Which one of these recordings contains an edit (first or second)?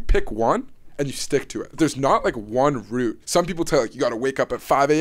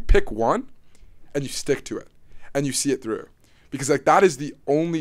first